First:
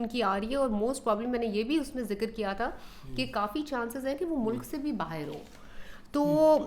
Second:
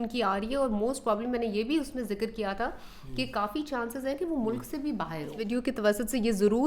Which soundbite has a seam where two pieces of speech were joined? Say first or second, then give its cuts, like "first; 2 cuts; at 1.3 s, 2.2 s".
second; 1 cut; at 5.4 s